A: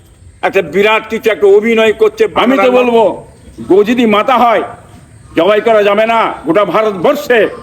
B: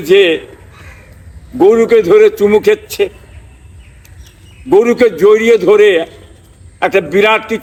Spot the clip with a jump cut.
A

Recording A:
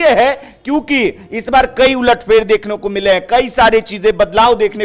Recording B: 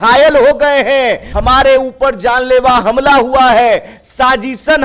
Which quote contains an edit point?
B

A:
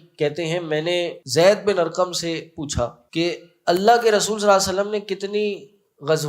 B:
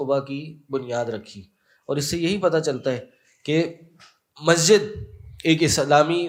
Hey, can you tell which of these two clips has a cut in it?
A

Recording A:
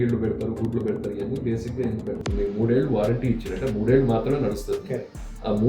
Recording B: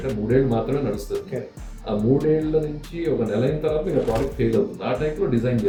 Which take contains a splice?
A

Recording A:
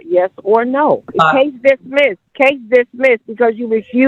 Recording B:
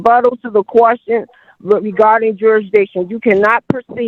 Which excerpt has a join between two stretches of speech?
A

